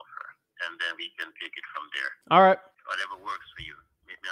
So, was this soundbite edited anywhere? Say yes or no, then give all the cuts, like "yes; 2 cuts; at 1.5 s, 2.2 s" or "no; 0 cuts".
yes; 2 cuts; at 2.1 s, 2.7 s